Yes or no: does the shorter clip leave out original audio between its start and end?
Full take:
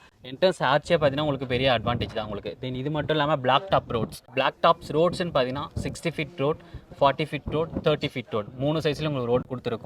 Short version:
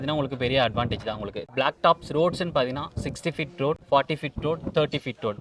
yes